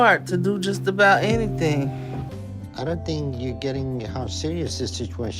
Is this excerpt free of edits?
no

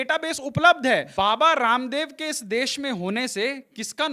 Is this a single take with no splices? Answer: no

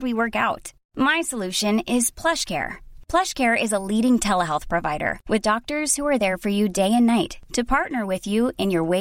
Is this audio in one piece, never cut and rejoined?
yes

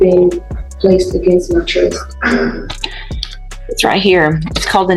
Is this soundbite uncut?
yes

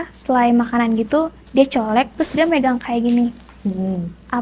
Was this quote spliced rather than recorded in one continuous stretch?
no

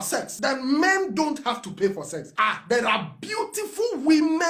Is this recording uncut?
yes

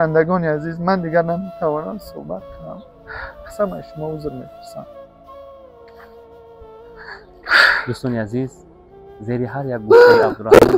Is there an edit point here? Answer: no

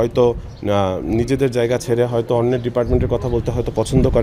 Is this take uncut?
yes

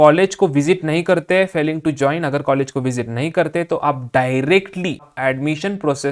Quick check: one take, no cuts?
no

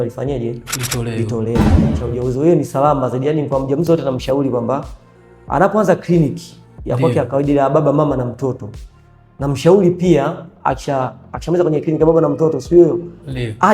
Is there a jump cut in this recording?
yes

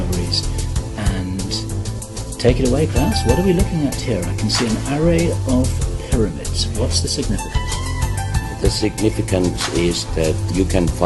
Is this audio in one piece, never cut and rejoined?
yes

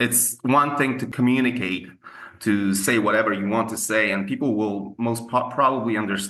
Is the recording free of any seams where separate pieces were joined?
no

